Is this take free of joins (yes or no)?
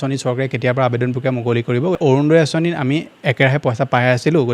no